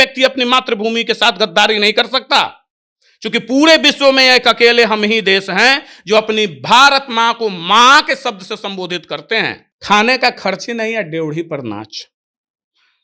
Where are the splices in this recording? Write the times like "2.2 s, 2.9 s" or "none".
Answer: 9.7 s